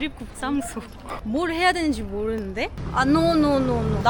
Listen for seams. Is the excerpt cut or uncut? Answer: cut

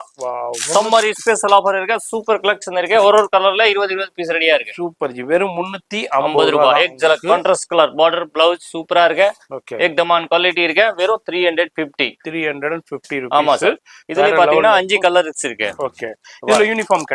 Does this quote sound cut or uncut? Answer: uncut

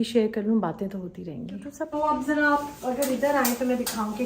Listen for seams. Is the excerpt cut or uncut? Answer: cut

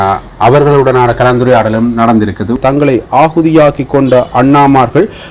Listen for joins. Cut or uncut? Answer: cut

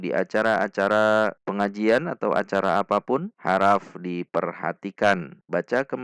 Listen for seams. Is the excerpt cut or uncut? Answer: uncut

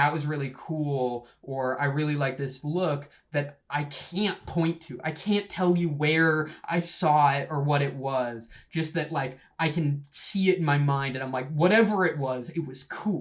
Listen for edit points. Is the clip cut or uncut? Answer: uncut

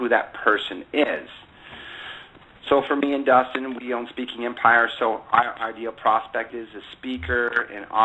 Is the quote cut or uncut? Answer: cut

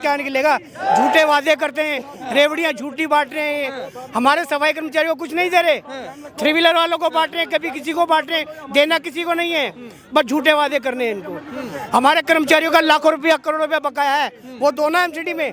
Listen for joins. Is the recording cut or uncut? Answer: uncut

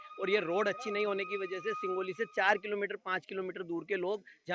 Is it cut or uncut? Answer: uncut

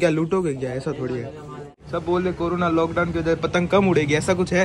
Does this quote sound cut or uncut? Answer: cut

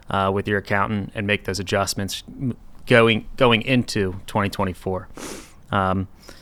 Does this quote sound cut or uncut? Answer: uncut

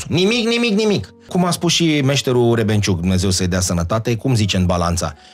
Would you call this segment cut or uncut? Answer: cut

